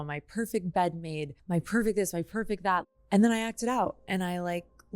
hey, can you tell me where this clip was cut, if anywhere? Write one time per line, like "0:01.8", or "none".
0:01.3
0:02.9